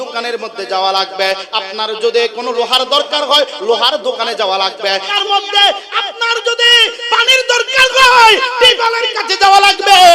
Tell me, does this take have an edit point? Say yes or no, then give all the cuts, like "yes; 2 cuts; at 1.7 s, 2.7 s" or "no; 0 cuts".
yes; 1 cut; at 5.2 s